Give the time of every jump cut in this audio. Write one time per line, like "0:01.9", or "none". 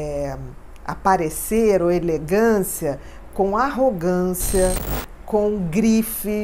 none

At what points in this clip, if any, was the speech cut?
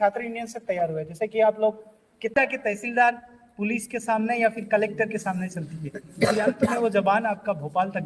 0:02.3

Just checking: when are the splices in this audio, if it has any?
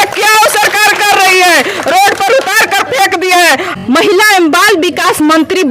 0:03.7

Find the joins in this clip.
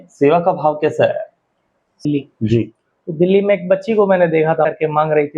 0:02.0
0:04.7

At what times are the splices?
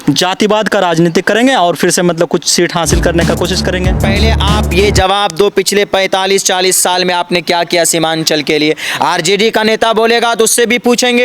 0:04.1

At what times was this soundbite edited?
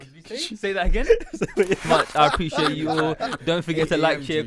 0:01.8

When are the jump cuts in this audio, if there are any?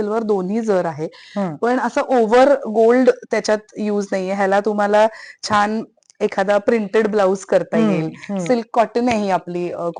none

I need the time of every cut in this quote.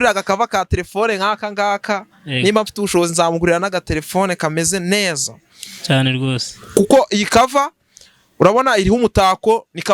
none

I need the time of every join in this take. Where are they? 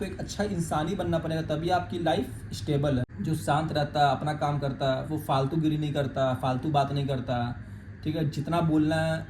0:03.1

